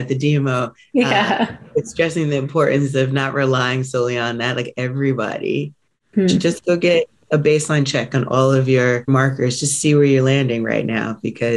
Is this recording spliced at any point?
yes; 2 cuts; at 6.1 s, 9.1 s

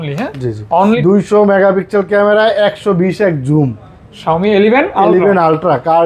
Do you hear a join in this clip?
yes; 1 cut; at 1.0 s

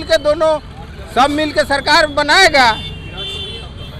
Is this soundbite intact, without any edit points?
yes; 0 cuts

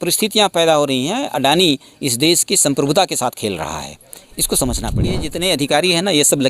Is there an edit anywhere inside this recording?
yes; 1 cut; at 5.3 s

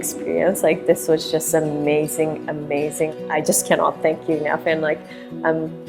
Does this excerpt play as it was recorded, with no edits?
no; 1 cut; at 3.1 s

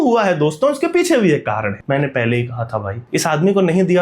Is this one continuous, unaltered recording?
no; 2 cuts; at 1.7 s, 3.0 s

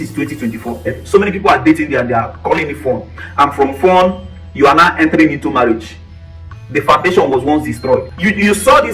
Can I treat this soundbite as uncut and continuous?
no; 2 cuts; at 1.0 s, 8.1 s

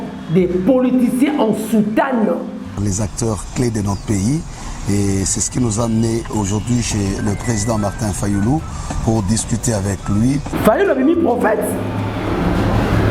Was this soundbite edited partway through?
yes; 2 cuts; at 2.8 s, 10.5 s

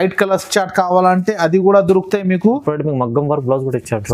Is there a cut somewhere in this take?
yes; 1 cut; at 2.6 s

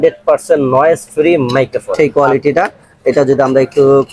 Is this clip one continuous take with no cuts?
no; 1 cut; at 1.9 s

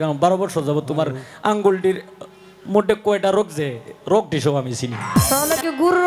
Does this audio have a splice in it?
yes; 1 cut; at 5.2 s

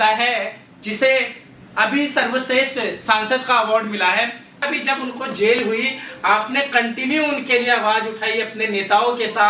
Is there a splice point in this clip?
yes; 1 cut; at 4.7 s

